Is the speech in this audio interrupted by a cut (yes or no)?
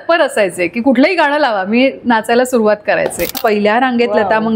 yes